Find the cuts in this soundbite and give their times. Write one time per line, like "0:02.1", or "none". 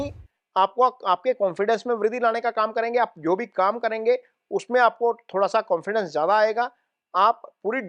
none